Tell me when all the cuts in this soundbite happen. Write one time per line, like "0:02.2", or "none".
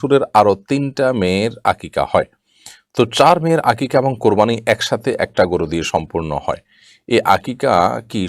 none